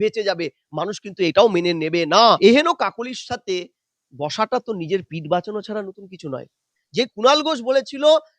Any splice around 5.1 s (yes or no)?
no